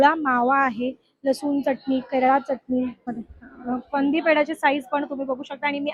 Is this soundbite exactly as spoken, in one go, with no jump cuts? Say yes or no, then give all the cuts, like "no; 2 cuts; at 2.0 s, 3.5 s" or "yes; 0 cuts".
no; 1 cut; at 3.1 s